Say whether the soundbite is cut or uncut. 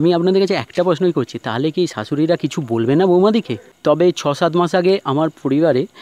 cut